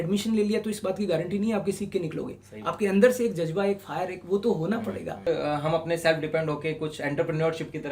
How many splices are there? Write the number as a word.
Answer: one